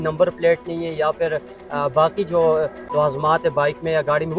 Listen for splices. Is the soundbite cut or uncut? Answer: uncut